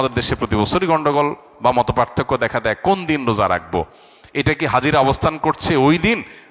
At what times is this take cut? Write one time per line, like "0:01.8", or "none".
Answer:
none